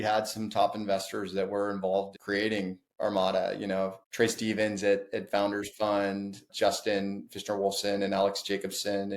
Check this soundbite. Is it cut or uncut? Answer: cut